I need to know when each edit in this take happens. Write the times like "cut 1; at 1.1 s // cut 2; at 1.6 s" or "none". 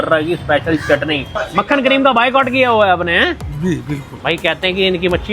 cut 1; at 1.4 s // cut 2; at 4.1 s